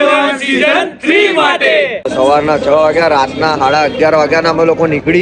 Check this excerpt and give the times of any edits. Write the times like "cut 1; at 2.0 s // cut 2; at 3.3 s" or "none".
cut 1; at 2.1 s